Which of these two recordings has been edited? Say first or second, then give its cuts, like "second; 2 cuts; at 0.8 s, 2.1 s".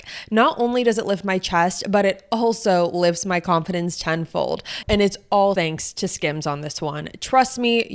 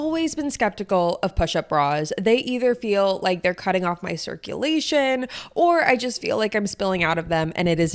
first; 2 cuts; at 4.7 s, 5.5 s